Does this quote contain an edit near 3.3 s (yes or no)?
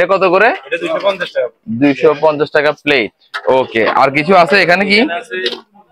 no